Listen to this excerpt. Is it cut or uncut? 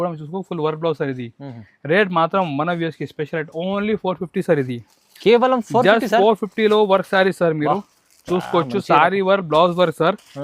uncut